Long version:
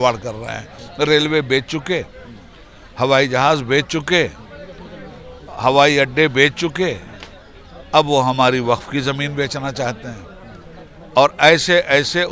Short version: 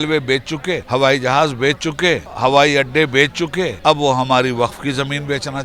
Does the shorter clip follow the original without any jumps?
no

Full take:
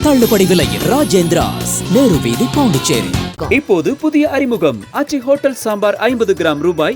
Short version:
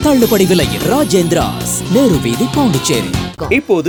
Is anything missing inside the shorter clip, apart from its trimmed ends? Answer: no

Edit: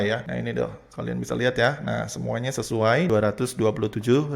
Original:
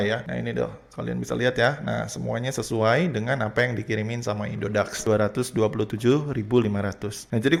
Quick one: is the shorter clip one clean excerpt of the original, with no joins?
no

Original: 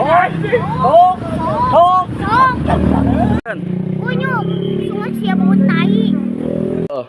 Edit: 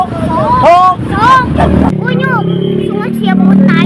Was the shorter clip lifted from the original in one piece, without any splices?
no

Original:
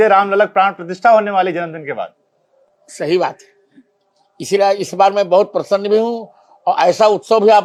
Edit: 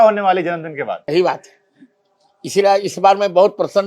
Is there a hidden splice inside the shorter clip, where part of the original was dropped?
yes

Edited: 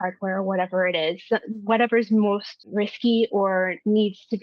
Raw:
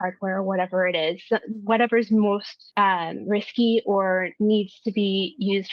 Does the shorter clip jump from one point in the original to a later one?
yes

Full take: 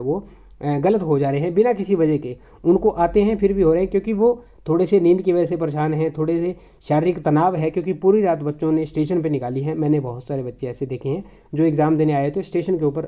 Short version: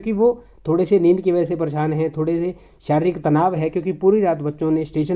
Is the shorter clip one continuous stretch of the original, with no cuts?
yes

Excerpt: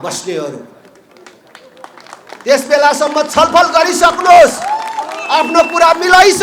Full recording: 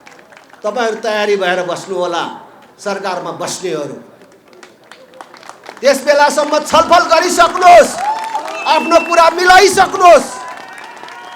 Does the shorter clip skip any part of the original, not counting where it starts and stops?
no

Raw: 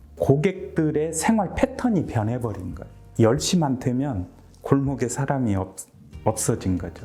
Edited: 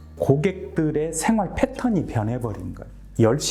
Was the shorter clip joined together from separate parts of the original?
no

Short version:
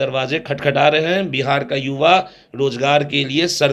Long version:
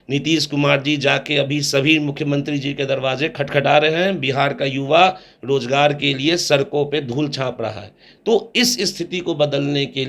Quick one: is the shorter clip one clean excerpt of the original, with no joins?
yes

